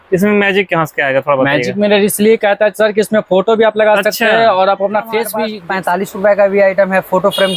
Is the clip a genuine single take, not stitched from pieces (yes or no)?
no